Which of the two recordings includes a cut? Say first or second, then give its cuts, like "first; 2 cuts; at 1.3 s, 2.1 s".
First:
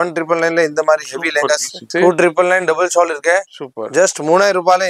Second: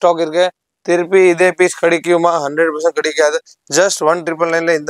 first; 1 cut; at 1.8 s